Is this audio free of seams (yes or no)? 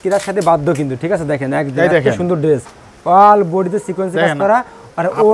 yes